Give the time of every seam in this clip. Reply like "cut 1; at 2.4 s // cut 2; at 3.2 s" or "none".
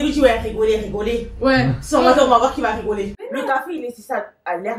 cut 1; at 3.2 s